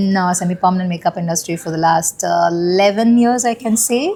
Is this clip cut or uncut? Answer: uncut